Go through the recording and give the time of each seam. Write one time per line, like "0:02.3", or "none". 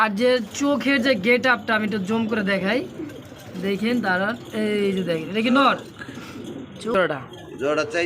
0:06.9

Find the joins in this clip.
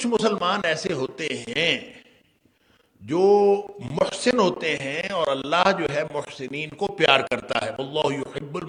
none

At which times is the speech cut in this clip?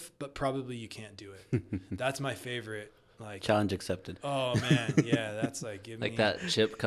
none

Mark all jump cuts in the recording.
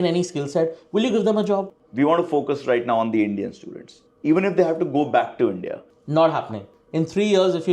0:01.7
0:04.1
0:05.9

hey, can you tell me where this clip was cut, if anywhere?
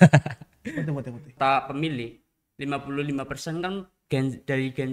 0:01.2

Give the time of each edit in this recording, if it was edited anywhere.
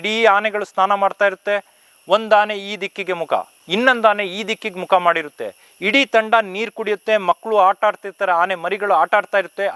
none

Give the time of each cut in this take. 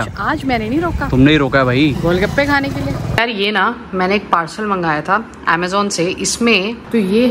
0:02.0
0:03.2
0:06.3

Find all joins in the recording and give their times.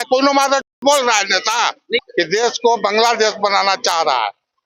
0:02.1

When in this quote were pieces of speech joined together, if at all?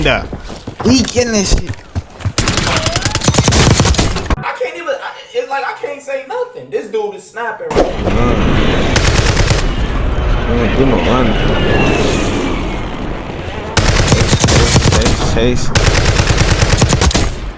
0:04.3
0:07.7

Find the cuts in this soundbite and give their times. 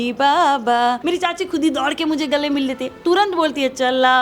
0:01.0

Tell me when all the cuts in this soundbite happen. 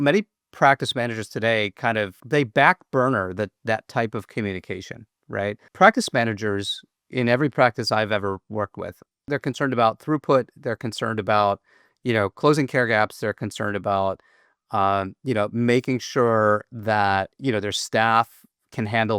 0:02.2
0:05.6
0:09.2
0:17.3

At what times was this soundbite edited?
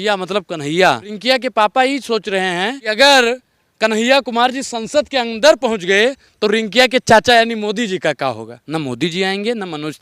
0:01.1
0:02.8
0:08.6

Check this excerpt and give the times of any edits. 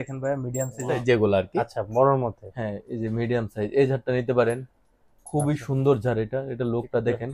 0:01.0

